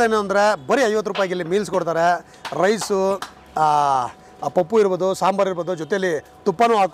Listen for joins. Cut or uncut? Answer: uncut